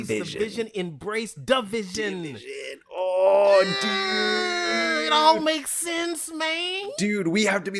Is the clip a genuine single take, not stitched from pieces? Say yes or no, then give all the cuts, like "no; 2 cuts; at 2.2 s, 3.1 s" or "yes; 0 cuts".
yes; 0 cuts